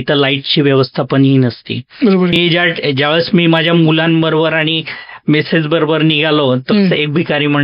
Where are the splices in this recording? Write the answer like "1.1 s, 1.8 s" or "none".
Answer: 2.4 s